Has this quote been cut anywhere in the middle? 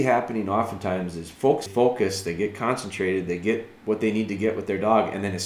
yes; 1 cut; at 1.7 s

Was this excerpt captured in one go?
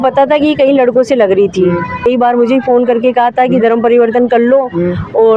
no; 1 cut; at 2.0 s

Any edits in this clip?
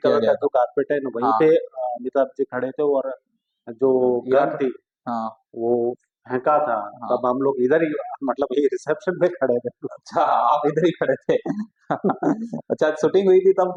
no; 0 cuts

